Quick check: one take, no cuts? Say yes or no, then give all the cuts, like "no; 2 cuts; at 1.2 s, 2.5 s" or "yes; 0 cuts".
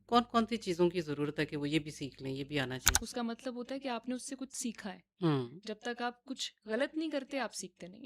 no; 1 cut; at 2.9 s